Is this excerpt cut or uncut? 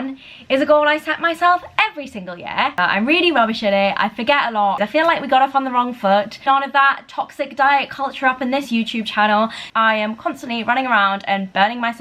cut